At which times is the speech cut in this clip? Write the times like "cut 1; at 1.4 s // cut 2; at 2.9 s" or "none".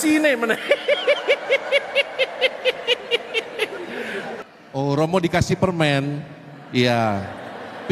cut 1; at 4.4 s